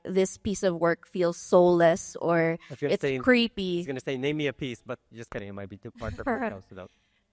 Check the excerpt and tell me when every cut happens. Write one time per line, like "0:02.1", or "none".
none